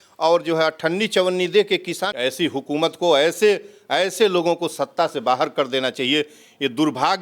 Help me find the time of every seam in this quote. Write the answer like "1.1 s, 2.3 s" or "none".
2.1 s